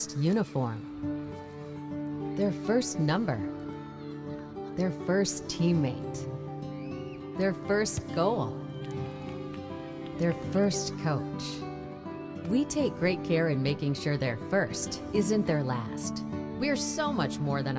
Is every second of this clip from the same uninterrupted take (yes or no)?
yes